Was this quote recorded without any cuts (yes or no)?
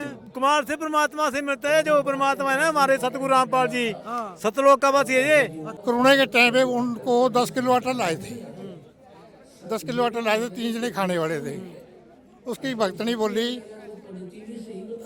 no